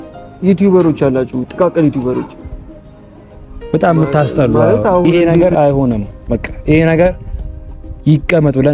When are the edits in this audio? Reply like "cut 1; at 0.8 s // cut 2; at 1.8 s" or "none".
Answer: cut 1; at 5.2 s

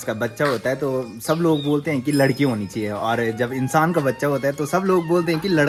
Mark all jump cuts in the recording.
none

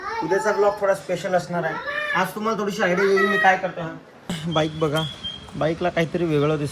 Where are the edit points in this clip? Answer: cut 1; at 4.3 s

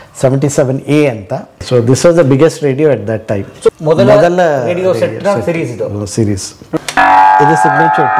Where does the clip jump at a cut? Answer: cut 1; at 1.5 s // cut 2; at 3.7 s // cut 3; at 6.6 s

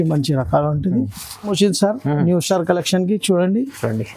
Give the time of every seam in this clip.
cut 1; at 1.5 s

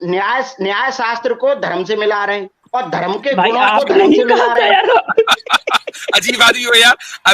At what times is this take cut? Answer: cut 1; at 2.5 s

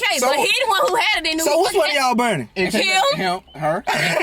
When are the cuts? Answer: none

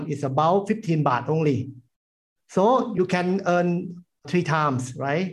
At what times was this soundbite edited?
cut 1; at 2.9 s

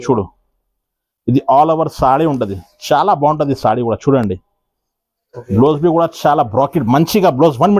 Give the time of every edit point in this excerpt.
none

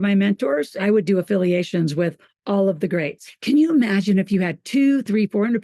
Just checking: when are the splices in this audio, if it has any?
cut 1; at 0.8 s // cut 2; at 3.3 s

